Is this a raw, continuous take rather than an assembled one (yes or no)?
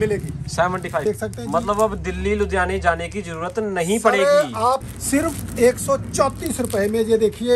no